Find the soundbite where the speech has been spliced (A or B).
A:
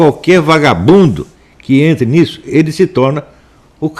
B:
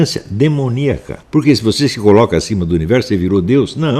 B